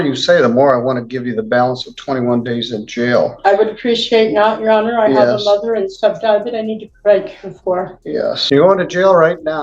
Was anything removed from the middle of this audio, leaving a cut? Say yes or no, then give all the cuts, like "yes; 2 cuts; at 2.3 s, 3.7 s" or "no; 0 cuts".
yes; 1 cut; at 8.4 s